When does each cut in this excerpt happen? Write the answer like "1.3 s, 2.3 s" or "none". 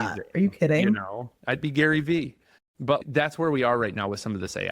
3.0 s